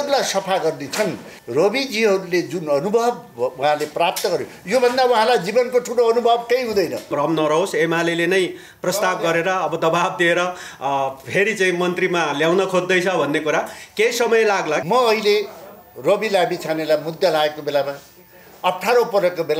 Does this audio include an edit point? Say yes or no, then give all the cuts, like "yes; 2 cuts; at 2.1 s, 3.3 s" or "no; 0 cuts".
yes; 3 cuts; at 1.3 s, 7.1 s, 14.8 s